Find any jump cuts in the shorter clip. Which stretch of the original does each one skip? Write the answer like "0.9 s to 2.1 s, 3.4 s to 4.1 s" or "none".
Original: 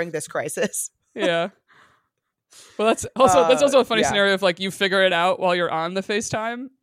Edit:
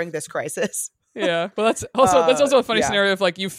1.5 s to 2.7 s

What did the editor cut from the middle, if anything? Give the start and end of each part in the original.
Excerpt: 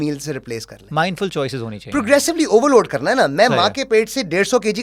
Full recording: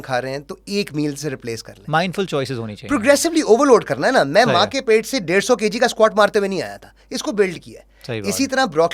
none

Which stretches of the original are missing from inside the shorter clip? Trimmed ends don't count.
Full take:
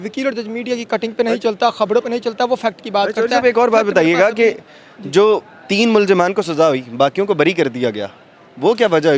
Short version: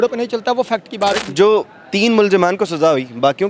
3.1 s to 5.0 s

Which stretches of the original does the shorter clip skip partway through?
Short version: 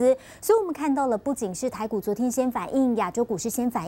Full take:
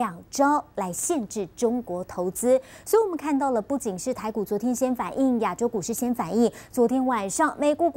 none

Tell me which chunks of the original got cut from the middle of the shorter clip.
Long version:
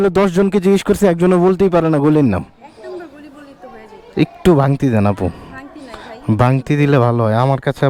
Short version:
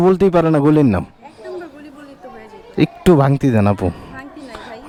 none

